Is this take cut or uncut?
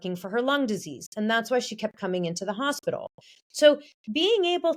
uncut